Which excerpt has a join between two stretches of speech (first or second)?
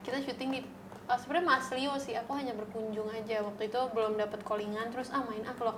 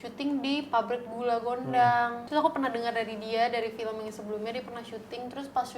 second